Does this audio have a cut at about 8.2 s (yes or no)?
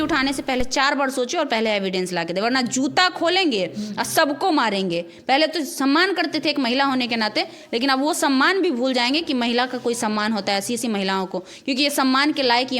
no